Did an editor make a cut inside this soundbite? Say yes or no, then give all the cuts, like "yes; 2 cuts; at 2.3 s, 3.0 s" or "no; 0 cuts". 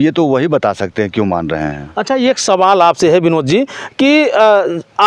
no; 0 cuts